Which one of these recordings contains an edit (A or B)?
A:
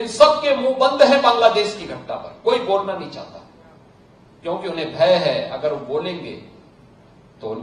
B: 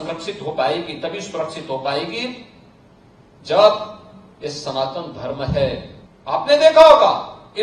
B